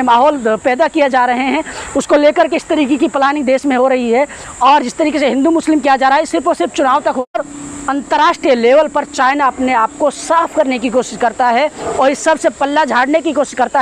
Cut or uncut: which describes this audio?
cut